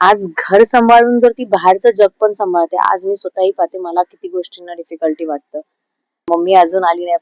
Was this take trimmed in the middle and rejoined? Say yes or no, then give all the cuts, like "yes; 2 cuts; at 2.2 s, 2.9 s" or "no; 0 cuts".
yes; 1 cut; at 6.3 s